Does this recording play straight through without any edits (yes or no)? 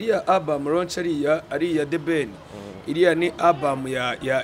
yes